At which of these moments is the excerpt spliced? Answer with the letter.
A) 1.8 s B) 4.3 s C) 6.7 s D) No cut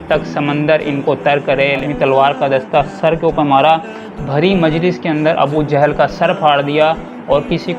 A